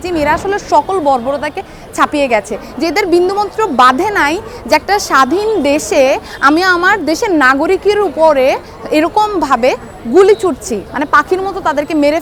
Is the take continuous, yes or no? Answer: yes